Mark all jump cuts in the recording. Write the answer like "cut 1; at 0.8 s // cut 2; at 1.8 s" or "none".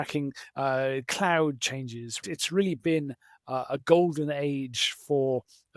cut 1; at 2.2 s